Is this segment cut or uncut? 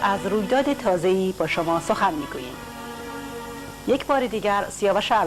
uncut